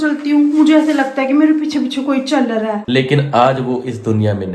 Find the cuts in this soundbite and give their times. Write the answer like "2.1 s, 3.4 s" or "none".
2.8 s